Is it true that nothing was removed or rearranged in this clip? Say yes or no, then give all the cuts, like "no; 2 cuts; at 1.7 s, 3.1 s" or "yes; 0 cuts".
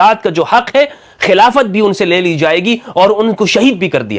yes; 0 cuts